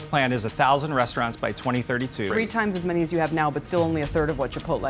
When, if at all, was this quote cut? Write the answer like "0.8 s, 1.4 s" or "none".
2.3 s